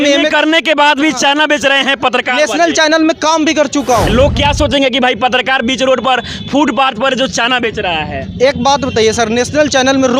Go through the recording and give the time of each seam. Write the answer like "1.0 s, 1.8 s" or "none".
4.1 s